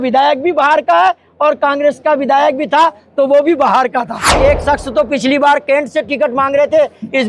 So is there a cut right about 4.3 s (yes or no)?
yes